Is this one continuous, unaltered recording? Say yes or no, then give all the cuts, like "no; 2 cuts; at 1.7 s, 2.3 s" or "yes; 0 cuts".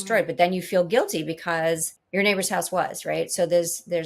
no; 1 cut; at 1.9 s